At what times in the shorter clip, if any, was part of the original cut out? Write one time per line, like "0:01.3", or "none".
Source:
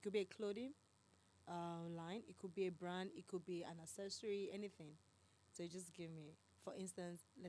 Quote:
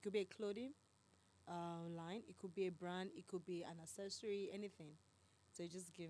none